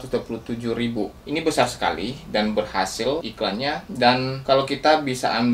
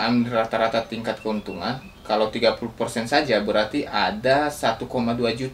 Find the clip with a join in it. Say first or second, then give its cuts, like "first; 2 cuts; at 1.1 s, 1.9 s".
first; 3 cuts; at 1.2 s, 3.2 s, 4.3 s